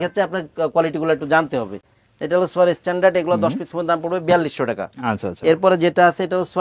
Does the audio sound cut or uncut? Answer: uncut